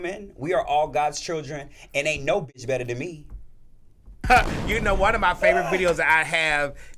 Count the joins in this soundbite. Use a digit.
1